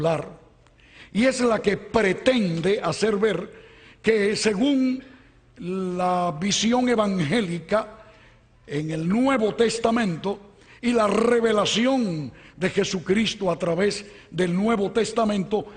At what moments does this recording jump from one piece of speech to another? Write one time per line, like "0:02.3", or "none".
0:01.1

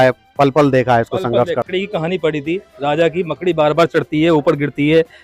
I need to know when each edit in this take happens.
0:01.7

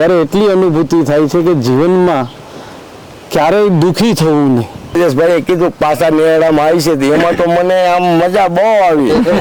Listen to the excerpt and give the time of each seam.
0:05.0

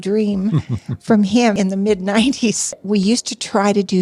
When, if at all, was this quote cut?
0:01.5
0:02.8

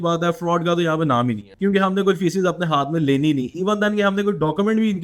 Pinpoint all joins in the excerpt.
none

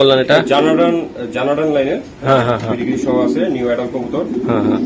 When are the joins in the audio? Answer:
none

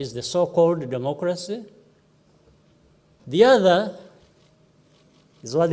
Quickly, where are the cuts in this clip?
0:03.2

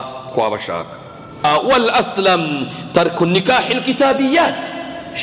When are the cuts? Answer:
0:01.4

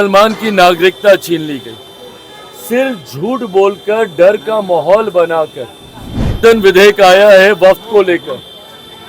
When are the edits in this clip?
0:06.4

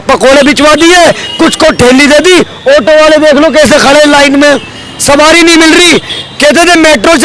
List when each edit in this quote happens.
none

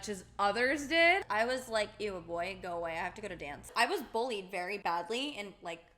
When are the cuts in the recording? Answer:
0:01.2
0:03.7
0:04.8

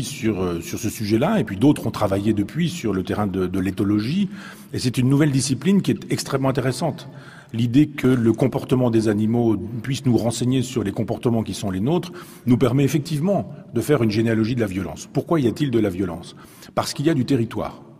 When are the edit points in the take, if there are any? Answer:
0:04.0

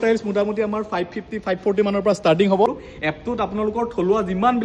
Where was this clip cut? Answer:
0:02.9

